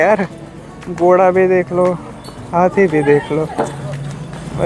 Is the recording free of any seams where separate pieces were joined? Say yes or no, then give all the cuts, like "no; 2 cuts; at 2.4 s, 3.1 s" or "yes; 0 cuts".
yes; 0 cuts